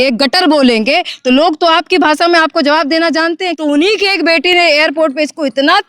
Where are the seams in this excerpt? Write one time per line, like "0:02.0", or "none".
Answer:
0:03.5